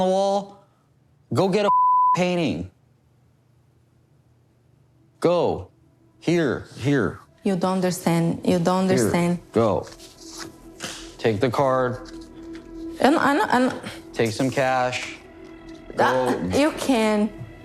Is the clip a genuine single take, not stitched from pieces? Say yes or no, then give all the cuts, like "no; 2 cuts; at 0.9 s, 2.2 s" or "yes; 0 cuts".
yes; 0 cuts